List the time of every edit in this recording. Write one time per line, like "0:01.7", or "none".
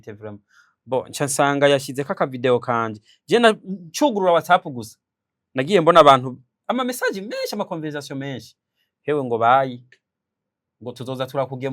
none